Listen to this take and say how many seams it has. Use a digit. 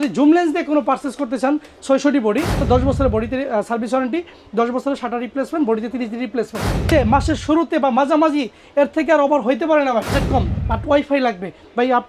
3